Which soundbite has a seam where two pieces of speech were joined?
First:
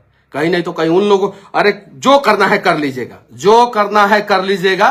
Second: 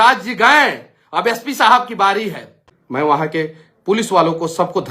second; 1 cut; at 2.7 s

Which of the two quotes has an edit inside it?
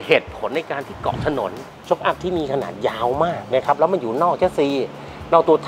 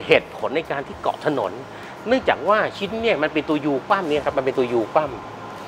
first; 1 cut; at 1.7 s

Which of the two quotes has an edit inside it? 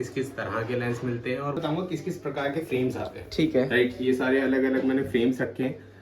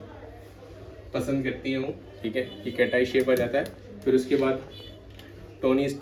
first; 1 cut; at 1.6 s

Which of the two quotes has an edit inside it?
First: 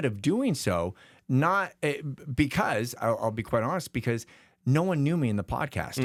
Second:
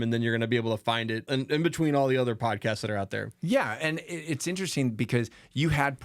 second; 1 cut; at 1.3 s

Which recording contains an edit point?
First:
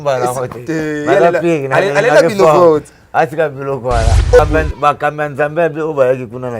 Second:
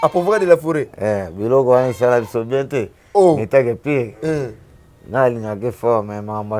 first; 1 cut; at 4.4 s

